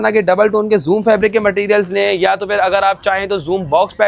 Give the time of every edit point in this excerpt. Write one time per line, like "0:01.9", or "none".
none